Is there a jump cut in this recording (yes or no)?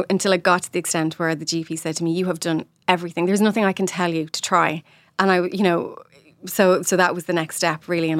no